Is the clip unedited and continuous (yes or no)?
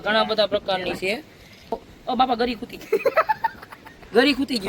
no